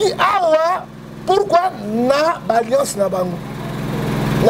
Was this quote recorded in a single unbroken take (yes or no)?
yes